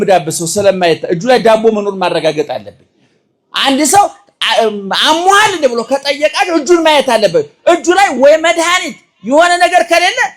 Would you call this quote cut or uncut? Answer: uncut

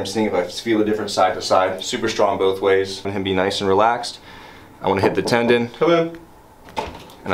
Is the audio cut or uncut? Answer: cut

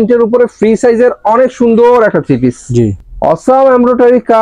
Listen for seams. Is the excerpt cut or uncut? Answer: cut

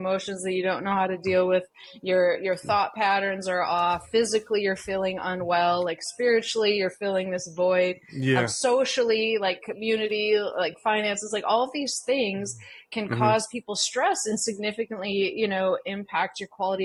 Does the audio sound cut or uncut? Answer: uncut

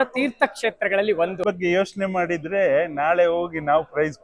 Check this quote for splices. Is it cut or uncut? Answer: cut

